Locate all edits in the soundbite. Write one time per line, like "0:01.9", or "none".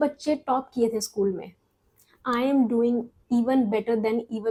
none